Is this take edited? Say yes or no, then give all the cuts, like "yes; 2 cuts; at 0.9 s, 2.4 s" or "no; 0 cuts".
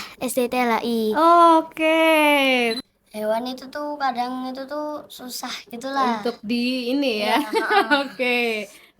yes; 1 cut; at 2.8 s